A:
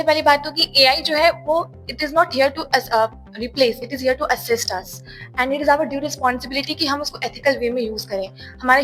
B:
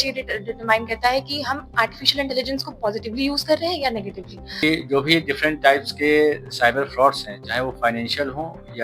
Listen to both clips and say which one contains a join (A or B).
B